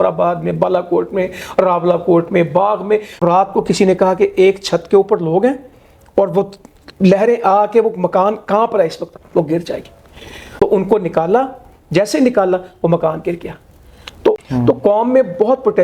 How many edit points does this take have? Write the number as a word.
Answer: three